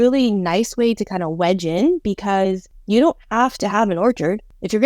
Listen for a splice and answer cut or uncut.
cut